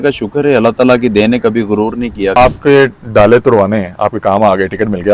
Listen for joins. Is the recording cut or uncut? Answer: cut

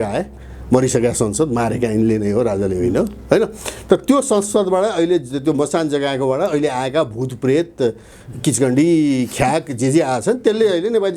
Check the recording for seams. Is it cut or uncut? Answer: uncut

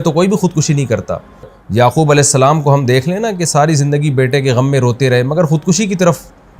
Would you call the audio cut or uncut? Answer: cut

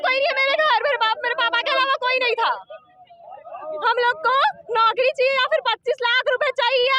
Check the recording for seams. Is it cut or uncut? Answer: uncut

